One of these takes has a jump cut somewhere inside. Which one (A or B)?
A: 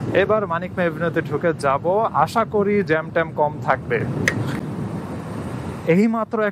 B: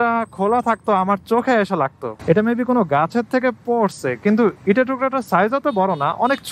B